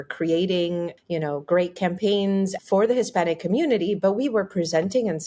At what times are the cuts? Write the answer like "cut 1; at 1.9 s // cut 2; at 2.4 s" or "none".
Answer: cut 1; at 2.6 s